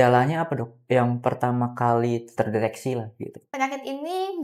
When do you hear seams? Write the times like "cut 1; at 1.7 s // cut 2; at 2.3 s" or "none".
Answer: cut 1; at 2.3 s // cut 2; at 3.4 s